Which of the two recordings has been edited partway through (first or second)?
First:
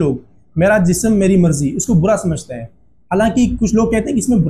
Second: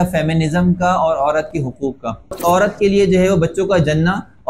second